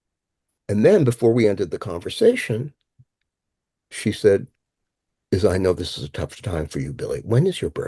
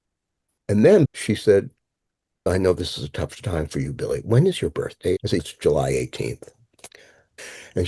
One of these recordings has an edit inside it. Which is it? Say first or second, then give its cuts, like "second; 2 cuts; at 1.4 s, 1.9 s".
second; 3 cuts; at 1.1 s, 2.5 s, 5.3 s